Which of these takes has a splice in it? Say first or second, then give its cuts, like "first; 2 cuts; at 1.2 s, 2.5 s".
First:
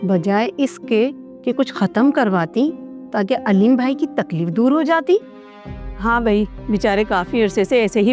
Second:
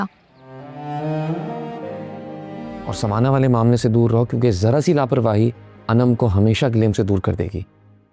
second; 1 cut; at 2.9 s